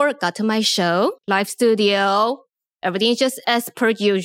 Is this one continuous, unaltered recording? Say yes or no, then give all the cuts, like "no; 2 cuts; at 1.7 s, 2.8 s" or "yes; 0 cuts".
no; 1 cut; at 1.2 s